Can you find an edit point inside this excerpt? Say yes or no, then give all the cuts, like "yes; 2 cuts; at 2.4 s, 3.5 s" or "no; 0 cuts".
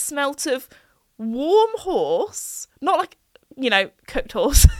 no; 0 cuts